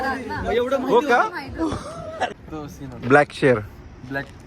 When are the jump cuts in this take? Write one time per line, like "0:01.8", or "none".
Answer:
0:02.3